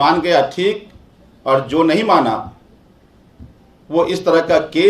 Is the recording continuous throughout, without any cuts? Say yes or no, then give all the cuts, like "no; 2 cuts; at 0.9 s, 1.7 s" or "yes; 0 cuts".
yes; 0 cuts